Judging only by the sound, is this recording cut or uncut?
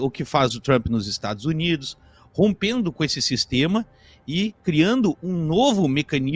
uncut